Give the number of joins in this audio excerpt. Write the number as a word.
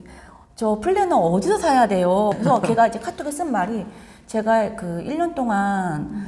one